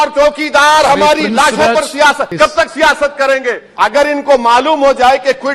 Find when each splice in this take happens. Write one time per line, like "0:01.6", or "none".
0:02.3
0:03.6